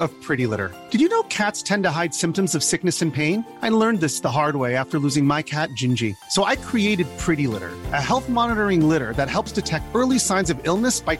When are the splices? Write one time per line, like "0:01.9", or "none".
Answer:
none